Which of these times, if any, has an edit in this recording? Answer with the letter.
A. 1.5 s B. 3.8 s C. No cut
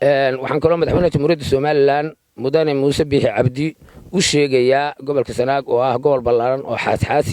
C